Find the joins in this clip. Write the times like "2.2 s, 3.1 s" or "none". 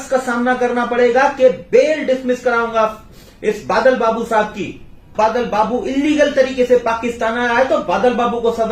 5.1 s